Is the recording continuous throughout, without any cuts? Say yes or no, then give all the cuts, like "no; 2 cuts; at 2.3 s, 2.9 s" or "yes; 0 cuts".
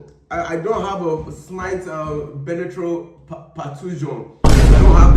no; 1 cut; at 4.1 s